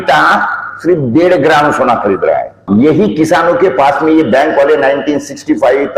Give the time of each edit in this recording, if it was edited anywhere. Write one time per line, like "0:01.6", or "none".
0:02.6